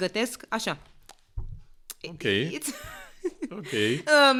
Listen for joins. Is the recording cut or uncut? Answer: uncut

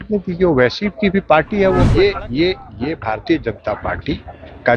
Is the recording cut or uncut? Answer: cut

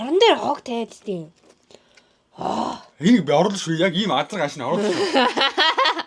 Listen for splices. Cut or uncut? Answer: uncut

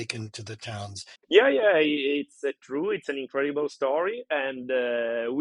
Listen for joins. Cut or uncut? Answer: cut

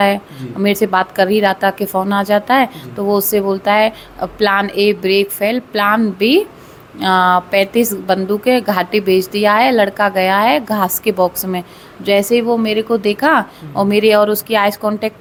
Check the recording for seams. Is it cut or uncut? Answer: uncut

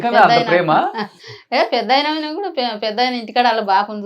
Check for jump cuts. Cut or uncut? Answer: uncut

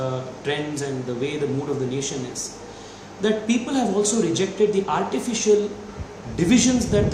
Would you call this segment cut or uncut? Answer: uncut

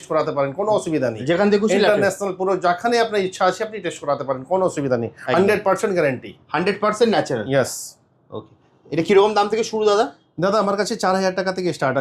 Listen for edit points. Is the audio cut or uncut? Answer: uncut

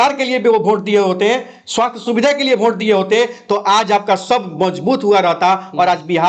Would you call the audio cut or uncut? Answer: uncut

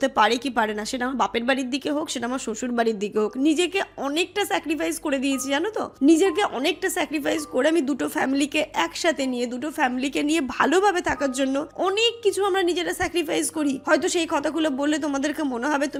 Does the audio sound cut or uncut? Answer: uncut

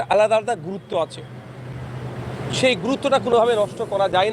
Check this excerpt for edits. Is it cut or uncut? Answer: uncut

